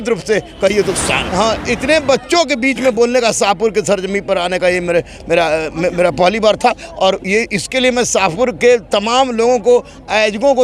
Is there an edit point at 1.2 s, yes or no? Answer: yes